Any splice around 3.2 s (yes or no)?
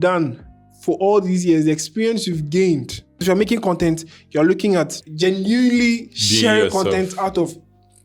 yes